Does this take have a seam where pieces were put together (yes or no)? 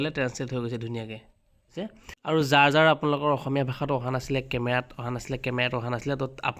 yes